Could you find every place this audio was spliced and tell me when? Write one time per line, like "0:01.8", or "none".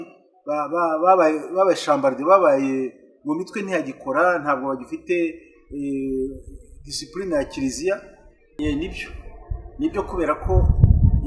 0:08.5